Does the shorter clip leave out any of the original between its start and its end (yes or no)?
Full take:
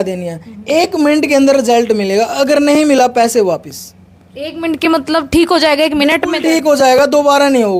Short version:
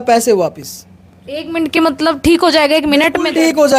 no